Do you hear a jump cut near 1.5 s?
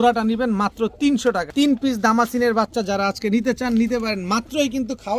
yes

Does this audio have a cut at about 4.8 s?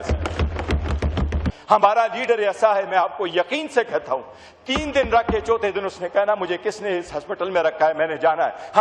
no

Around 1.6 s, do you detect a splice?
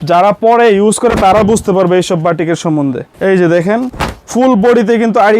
no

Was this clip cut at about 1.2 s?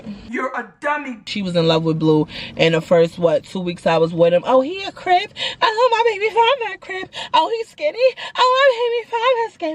yes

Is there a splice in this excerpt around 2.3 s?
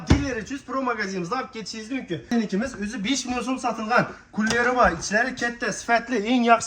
yes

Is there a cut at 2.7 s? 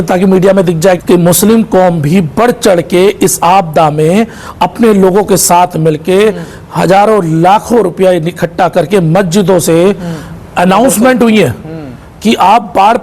no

